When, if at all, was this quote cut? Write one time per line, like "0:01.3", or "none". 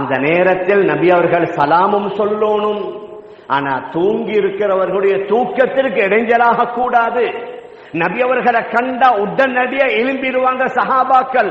none